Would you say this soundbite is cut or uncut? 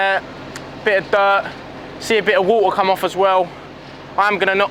uncut